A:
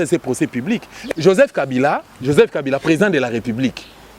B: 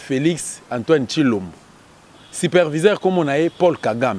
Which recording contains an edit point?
A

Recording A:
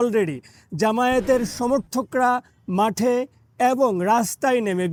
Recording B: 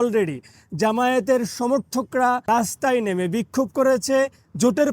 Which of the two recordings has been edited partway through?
B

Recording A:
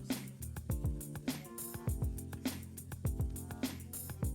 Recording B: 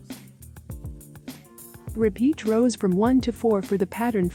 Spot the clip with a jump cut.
A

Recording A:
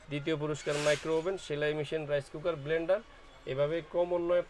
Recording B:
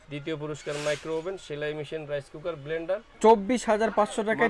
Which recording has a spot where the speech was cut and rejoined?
B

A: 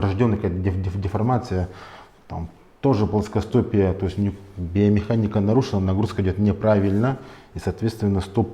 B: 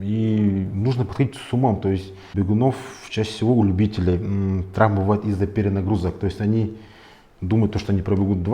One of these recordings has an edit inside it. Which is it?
B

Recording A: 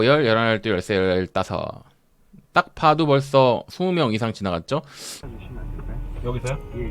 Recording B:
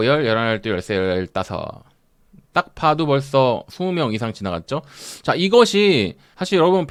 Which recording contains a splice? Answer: A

